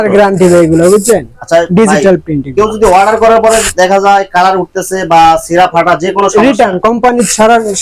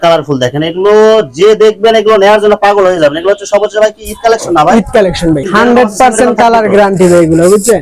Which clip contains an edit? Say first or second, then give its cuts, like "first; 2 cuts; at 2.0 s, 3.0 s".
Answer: second; 1 cut; at 5.5 s